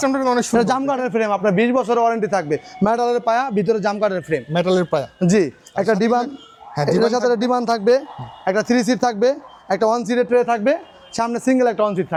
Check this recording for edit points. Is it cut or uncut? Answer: uncut